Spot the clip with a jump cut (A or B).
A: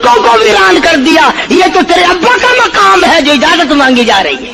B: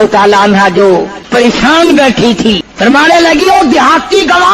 B